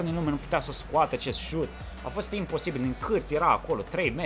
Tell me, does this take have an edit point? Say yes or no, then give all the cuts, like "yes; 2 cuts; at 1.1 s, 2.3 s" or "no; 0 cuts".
no; 0 cuts